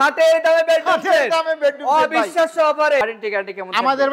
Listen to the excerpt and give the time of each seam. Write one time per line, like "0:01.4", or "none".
0:03.1